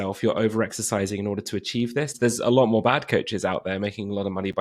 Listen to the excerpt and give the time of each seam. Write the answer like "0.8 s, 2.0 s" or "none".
2.1 s